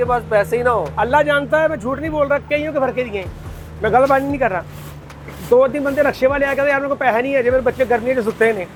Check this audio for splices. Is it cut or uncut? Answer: uncut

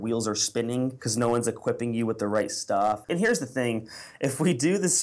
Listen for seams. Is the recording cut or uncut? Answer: cut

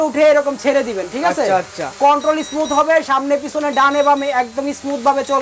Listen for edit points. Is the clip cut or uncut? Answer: uncut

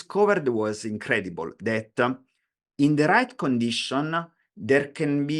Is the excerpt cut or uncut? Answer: uncut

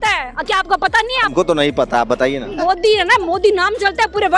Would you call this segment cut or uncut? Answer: cut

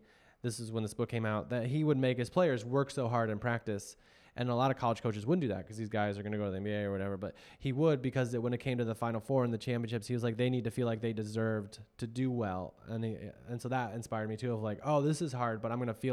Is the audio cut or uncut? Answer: uncut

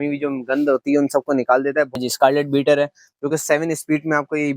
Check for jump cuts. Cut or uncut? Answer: cut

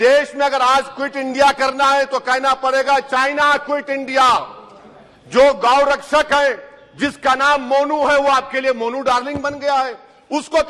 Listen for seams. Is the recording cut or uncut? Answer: uncut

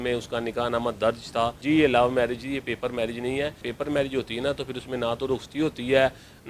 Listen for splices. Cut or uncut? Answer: cut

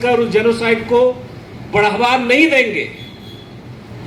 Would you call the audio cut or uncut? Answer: uncut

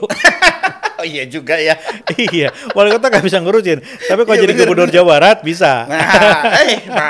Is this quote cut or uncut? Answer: uncut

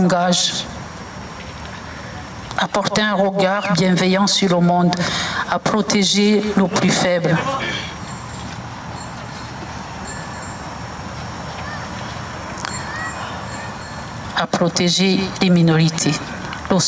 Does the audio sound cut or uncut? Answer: uncut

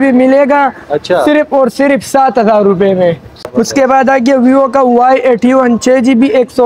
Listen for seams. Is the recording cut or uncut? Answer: cut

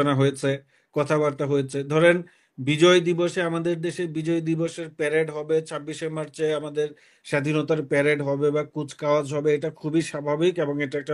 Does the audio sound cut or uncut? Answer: uncut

